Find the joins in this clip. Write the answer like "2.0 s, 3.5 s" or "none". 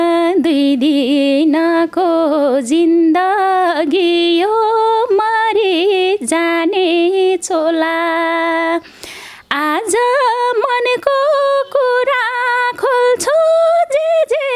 none

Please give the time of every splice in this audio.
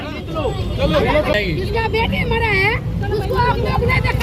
1.3 s

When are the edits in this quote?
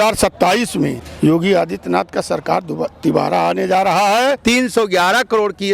1.0 s, 4.4 s

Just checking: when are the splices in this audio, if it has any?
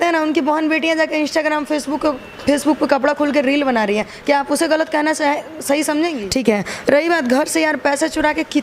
6.2 s

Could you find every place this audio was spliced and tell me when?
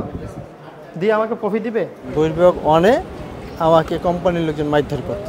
2.0 s

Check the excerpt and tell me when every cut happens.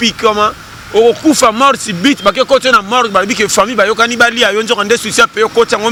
none

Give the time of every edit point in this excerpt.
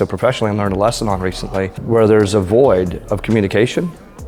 1.8 s

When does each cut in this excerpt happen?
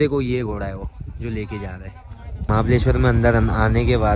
2.5 s

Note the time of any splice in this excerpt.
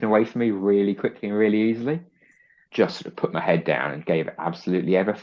2.6 s

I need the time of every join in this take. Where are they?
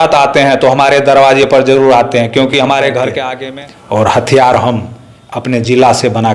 3.3 s

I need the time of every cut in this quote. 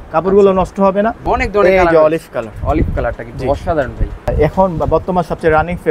1.2 s, 4.3 s

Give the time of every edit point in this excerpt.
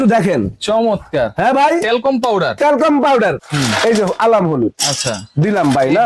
3.4 s

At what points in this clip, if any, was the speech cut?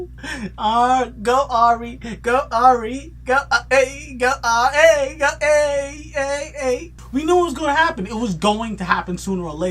6.9 s

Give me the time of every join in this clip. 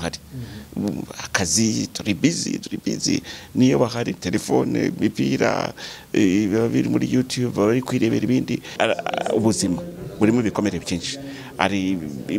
8.7 s

